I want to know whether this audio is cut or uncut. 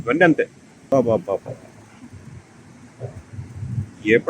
cut